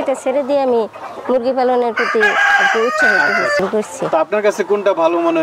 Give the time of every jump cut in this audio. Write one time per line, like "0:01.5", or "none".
0:03.6

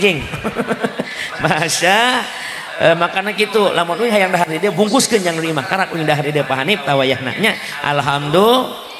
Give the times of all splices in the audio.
none

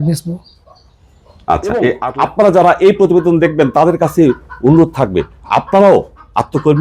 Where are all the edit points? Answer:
0:02.0

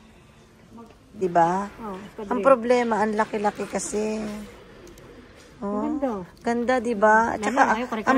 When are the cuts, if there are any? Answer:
0:01.2

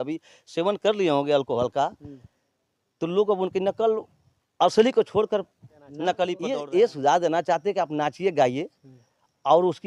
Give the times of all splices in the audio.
0:06.4

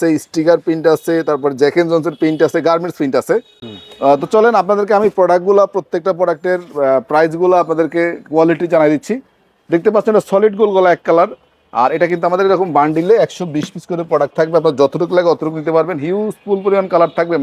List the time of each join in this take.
none

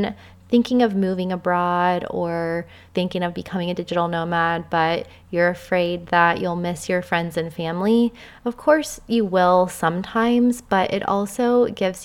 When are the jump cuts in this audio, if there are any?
0:02.8

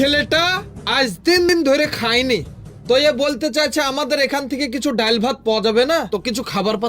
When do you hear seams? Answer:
0:01.5

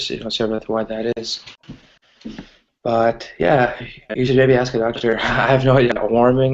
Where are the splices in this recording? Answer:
0:03.9

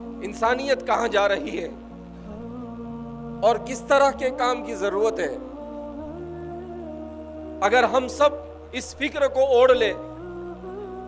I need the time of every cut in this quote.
0:01.7
0:03.1
0:05.4
0:07.6

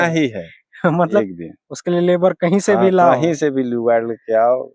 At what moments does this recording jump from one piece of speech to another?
0:01.2

